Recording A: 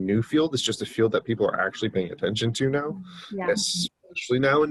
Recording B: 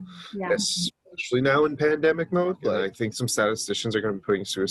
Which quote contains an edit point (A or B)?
B